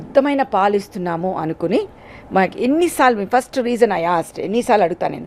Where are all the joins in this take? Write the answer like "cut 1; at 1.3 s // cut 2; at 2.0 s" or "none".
none